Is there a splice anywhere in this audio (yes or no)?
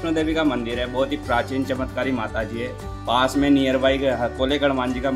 no